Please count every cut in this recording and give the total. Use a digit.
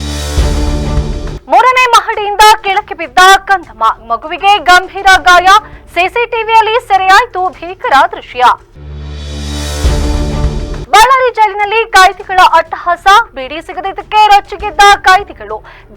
1